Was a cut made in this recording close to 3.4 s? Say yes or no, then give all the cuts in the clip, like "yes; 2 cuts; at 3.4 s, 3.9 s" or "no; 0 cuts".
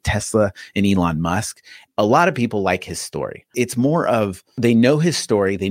yes; 2 cuts; at 1.7 s, 3.4 s